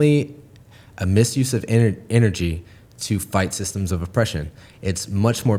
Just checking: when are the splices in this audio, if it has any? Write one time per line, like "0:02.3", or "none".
none